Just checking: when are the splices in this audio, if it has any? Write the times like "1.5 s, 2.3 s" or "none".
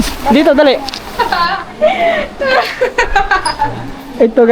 1.0 s